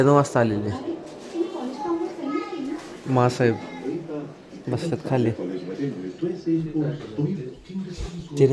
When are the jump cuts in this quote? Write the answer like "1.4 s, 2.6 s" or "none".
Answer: none